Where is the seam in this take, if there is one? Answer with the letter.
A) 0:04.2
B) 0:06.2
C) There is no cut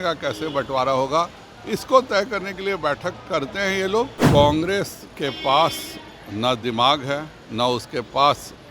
A